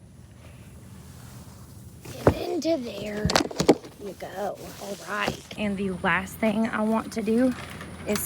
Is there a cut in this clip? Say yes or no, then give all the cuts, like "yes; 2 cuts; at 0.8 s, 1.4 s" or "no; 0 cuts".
yes; 1 cut; at 5.5 s